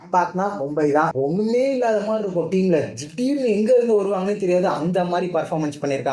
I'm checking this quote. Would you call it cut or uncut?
cut